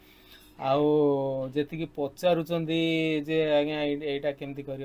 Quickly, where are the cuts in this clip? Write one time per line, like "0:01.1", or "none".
none